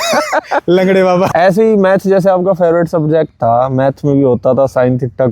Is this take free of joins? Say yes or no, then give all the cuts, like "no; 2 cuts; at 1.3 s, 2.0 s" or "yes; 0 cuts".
no; 1 cut; at 1.3 s